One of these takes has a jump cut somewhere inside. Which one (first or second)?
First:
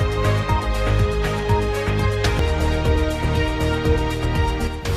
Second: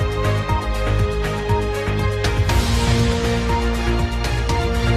second